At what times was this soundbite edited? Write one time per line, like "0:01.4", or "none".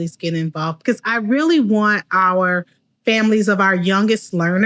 none